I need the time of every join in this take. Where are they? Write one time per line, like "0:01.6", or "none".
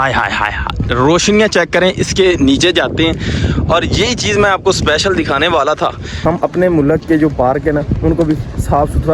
0:06.2